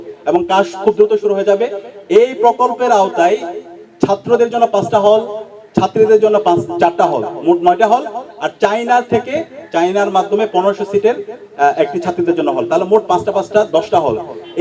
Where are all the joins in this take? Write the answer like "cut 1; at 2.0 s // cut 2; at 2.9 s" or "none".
none